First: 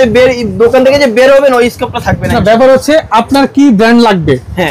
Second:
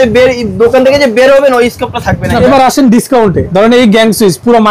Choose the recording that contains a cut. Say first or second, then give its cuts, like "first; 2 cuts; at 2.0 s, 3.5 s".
second; 2 cuts; at 2.4 s, 3.4 s